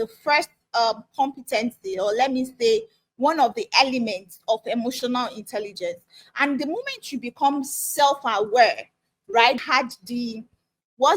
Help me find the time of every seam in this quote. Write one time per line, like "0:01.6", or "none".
0:09.6